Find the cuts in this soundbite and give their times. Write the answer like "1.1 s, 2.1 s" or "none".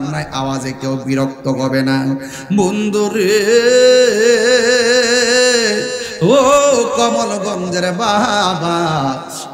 none